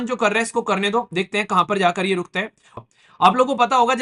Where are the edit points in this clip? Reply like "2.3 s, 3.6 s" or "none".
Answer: 2.7 s